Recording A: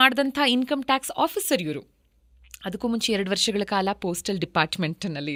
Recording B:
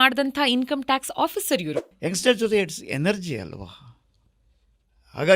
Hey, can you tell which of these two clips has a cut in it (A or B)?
B